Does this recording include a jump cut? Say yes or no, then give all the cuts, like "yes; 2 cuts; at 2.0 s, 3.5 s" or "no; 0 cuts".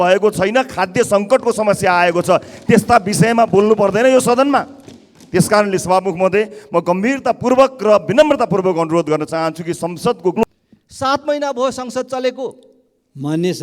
yes; 1 cut; at 10.4 s